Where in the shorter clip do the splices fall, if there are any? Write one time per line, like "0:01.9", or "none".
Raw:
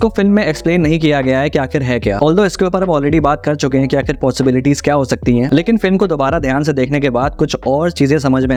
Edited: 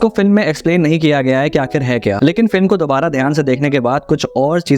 0:02.2